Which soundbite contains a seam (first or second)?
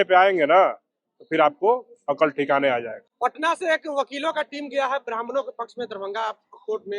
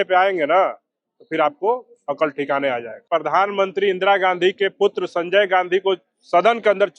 second